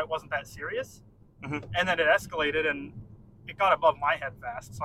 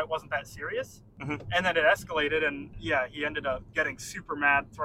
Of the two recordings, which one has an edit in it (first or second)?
second